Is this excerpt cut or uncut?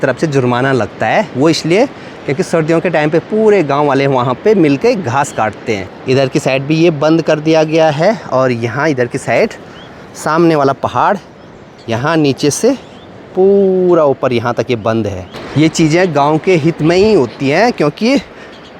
uncut